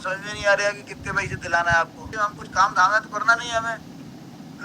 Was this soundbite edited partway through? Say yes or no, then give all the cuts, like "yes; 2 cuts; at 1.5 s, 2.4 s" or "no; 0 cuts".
yes; 1 cut; at 2.0 s